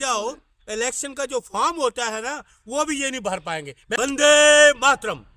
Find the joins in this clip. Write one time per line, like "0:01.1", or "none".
0:03.8